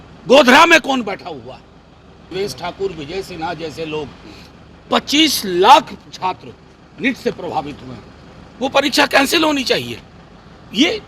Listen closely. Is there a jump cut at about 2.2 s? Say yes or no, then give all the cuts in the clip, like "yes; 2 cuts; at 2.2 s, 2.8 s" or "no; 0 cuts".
yes; 1 cut; at 2.2 s